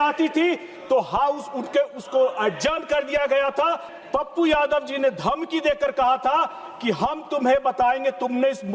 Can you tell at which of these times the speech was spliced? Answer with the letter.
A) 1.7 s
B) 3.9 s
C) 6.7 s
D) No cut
B